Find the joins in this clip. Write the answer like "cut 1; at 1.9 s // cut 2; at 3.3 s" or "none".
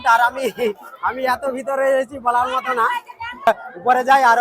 cut 1; at 3.5 s

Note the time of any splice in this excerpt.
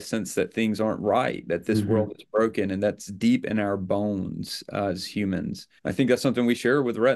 cut 1; at 5.7 s

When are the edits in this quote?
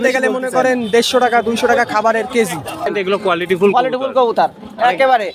cut 1; at 2.9 s

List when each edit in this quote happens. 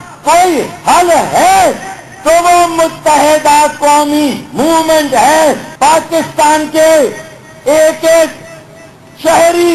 cut 1; at 5.7 s // cut 2; at 6.7 s

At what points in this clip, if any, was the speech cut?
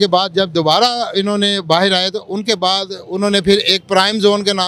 none

